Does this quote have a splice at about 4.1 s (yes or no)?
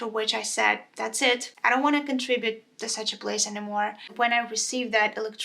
yes